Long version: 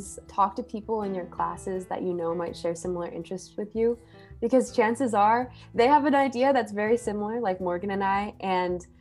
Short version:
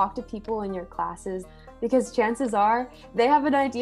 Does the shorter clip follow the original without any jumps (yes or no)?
no